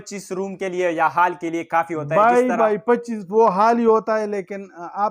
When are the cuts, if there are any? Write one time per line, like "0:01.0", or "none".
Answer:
none

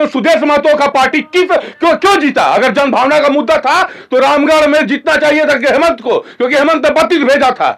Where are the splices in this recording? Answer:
none

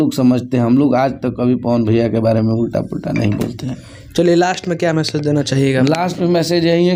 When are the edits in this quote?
none

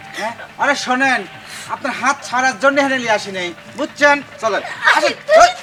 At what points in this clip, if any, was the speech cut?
none

